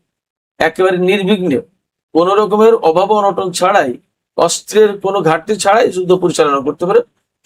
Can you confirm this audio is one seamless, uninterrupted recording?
yes; 0 cuts

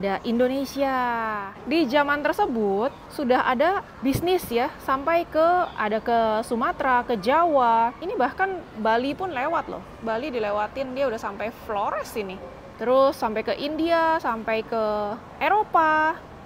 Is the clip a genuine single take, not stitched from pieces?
no; 6 cuts; at 1.5 s, 3.1 s, 3.9 s, 8.0 s, 12.6 s, 15.2 s

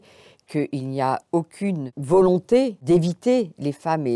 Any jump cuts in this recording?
yes; 2 cuts; at 1.9 s, 2.8 s

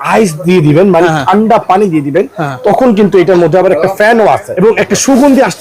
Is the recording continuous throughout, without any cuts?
no; 1 cut; at 4.5 s

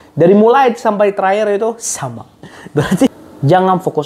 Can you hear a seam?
yes; 1 cut; at 3.1 s

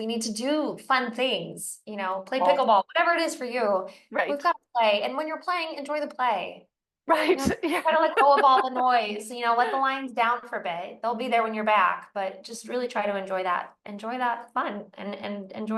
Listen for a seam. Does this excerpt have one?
no; 0 cuts

